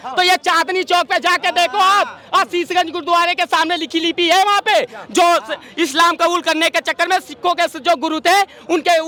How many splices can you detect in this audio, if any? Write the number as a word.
zero